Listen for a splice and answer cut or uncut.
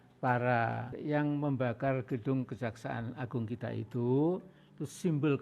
cut